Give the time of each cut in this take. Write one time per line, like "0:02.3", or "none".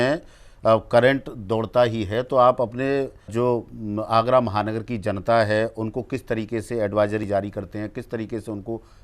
0:03.3